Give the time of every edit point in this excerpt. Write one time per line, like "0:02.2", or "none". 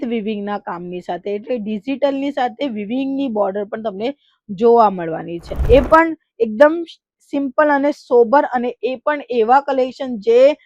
0:05.5

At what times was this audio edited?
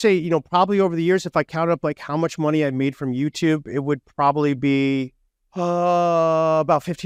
none

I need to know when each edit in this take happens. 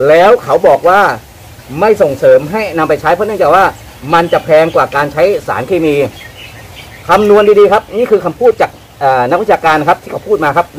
none

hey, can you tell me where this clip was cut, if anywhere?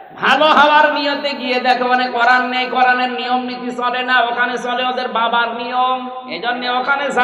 none

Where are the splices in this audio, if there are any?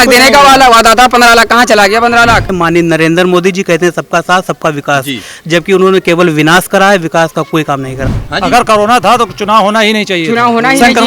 0:02.5
0:08.0

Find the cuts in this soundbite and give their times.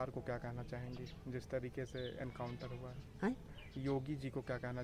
none

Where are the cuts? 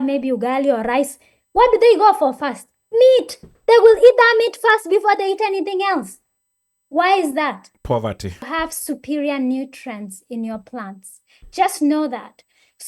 0:08.5

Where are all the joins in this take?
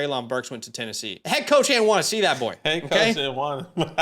0:01.1

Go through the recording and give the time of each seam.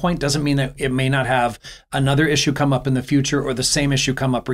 none

